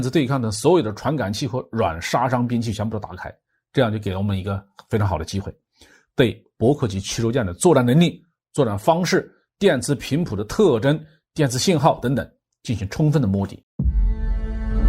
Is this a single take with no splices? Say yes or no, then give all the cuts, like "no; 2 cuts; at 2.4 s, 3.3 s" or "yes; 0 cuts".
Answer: no; 1 cut; at 13.6 s